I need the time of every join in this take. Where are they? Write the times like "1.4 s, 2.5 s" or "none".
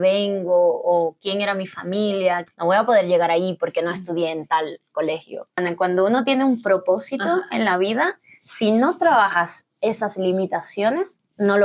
2.5 s, 5.6 s